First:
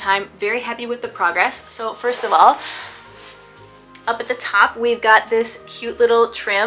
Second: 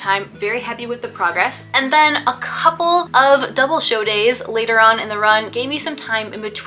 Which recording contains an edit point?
second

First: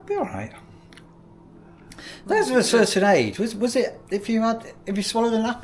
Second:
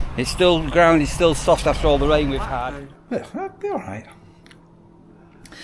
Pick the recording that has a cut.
second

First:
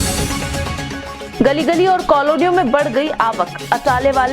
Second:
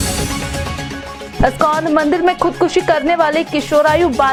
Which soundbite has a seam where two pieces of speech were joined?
first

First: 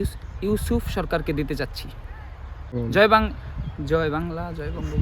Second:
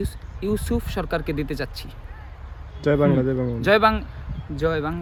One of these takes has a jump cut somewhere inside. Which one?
first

